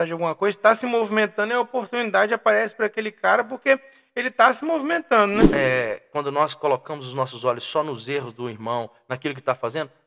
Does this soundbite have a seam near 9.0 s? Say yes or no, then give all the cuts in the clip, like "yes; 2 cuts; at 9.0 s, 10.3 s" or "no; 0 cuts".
no; 1 cut; at 5.5 s